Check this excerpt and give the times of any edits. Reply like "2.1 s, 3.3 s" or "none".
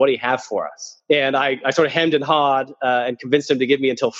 0.9 s